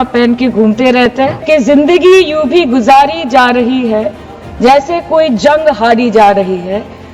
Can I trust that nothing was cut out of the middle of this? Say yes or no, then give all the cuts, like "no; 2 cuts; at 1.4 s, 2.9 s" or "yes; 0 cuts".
no; 1 cut; at 1.4 s